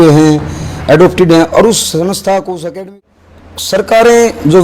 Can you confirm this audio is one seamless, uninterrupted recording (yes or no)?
no